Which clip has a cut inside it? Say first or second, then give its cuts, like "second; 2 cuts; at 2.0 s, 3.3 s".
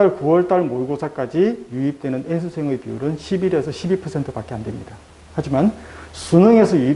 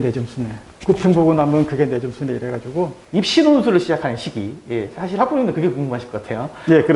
second; 1 cut; at 3.0 s